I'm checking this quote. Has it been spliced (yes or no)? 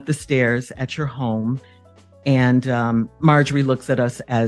no